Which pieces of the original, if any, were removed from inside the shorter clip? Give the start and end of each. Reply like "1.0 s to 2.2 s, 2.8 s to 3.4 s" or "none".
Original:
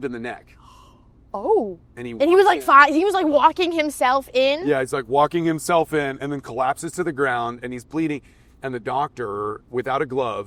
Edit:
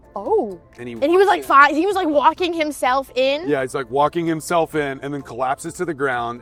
none